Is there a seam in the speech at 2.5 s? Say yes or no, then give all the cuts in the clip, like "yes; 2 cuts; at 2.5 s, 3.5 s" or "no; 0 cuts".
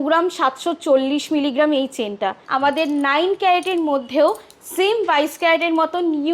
yes; 1 cut; at 2.5 s